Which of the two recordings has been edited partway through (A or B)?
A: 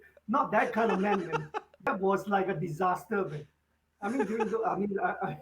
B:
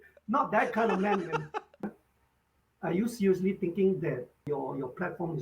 B